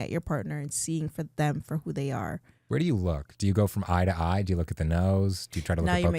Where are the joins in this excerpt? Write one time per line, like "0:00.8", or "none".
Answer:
0:02.5